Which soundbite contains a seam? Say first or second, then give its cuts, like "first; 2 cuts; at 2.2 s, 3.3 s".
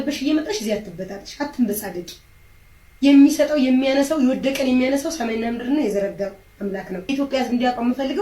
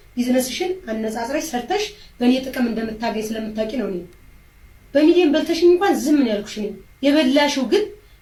first; 1 cut; at 7.1 s